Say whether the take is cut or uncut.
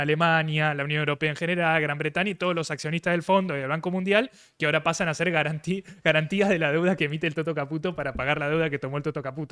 uncut